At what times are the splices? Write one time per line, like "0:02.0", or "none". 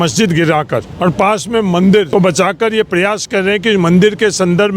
0:00.9
0:02.1